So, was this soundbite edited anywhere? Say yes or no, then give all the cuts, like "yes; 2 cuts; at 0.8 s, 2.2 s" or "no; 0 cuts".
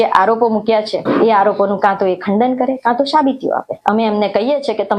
yes; 2 cuts; at 1.0 s, 3.7 s